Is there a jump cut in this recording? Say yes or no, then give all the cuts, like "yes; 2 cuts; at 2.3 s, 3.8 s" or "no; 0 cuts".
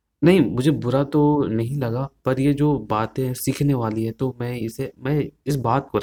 no; 0 cuts